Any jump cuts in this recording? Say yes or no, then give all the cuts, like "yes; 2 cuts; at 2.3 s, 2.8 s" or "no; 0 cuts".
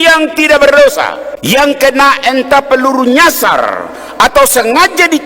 yes; 1 cut; at 1.3 s